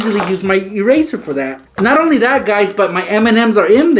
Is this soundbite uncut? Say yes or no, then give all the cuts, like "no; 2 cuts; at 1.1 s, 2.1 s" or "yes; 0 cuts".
no; 1 cut; at 1.6 s